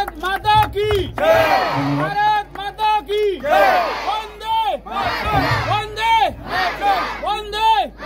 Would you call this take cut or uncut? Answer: uncut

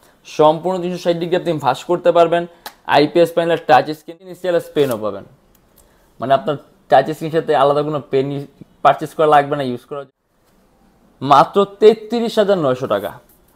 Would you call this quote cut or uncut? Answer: cut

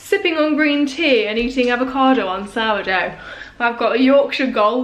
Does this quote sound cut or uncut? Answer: uncut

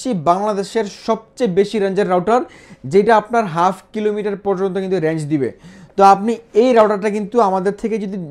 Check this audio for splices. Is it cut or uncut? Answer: uncut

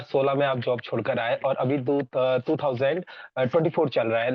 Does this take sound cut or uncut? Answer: uncut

